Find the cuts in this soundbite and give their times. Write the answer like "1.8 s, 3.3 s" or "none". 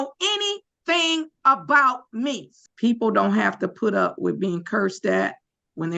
2.5 s